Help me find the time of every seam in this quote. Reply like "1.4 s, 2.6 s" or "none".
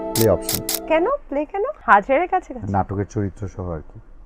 1.8 s